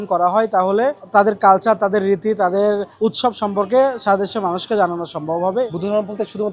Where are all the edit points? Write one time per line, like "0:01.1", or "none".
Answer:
0:01.0
0:02.9
0:05.7